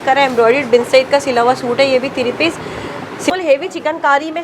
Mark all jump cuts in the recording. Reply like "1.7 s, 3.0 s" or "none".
3.3 s